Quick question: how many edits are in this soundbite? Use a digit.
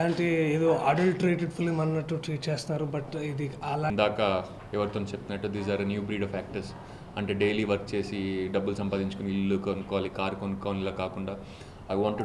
1